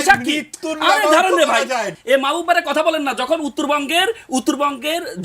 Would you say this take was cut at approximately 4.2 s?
no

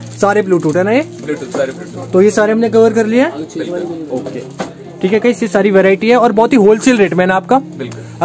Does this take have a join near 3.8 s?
no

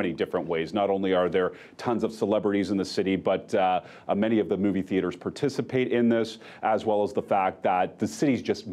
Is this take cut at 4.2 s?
no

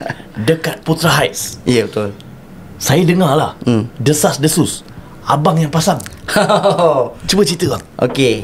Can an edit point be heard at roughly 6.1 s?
no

